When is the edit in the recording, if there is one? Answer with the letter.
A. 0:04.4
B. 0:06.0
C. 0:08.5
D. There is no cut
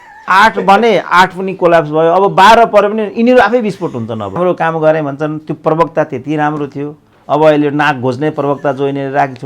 A